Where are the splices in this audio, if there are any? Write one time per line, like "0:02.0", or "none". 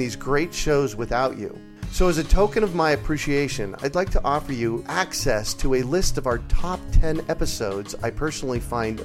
none